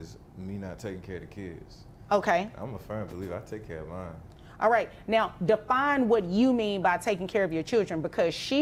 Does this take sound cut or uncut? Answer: uncut